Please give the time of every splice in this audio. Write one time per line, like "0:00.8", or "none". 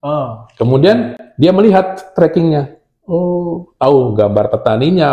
none